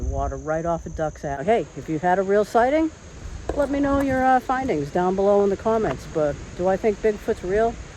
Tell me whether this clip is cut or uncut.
cut